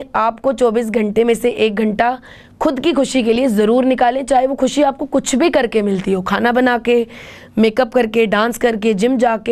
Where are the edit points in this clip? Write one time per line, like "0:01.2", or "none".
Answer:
none